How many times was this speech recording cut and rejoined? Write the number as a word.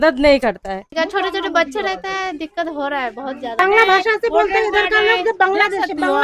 two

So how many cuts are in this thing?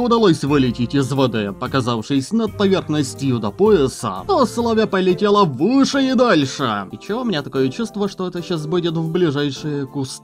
two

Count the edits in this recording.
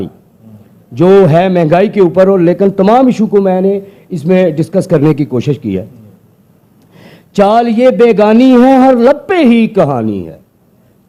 zero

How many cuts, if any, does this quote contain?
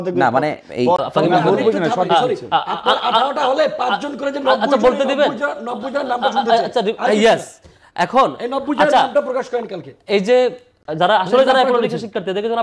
two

